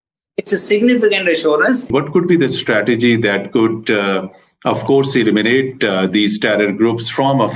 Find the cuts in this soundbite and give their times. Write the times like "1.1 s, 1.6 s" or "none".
1.9 s